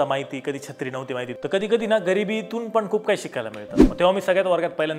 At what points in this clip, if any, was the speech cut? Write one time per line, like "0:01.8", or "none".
0:01.3
0:03.9